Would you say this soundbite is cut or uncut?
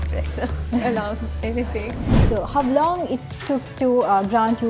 cut